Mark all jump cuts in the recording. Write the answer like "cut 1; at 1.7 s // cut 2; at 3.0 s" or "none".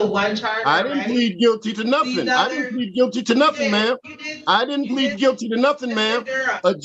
none

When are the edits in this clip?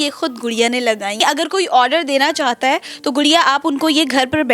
cut 1; at 1.2 s

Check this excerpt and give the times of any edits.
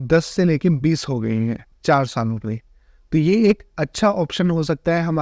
cut 1; at 1.7 s

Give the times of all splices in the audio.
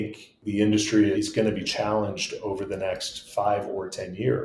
cut 1; at 1.1 s

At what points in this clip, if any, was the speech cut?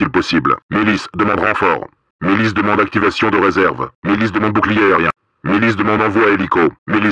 none

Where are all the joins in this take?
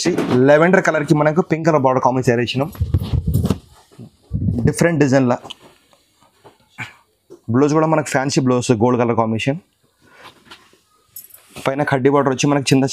none

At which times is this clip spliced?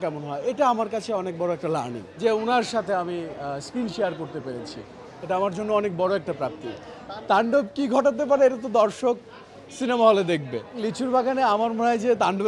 cut 1; at 2.0 s // cut 2; at 10.9 s

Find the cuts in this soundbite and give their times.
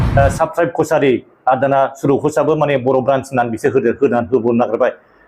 none

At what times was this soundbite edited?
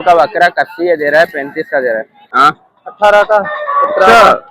cut 1; at 2.2 s

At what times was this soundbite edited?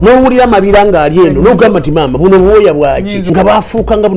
cut 1; at 3.2 s

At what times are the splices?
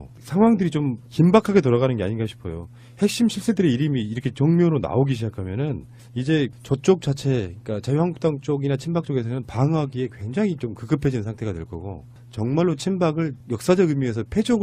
cut 1; at 13.2 s

